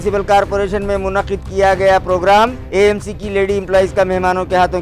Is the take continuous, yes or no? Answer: yes